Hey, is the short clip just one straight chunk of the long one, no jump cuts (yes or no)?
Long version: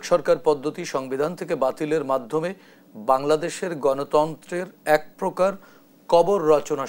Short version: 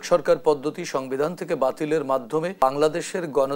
no